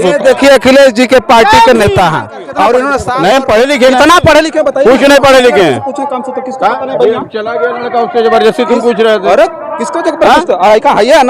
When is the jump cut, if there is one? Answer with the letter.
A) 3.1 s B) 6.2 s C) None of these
A